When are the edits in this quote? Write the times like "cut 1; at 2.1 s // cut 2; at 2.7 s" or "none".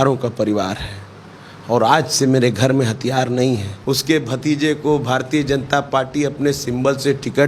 cut 1; at 3.7 s